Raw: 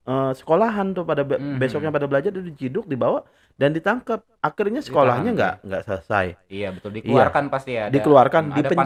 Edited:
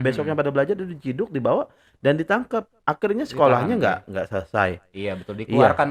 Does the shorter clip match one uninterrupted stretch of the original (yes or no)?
yes